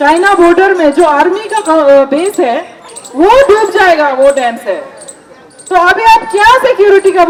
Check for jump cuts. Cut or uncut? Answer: uncut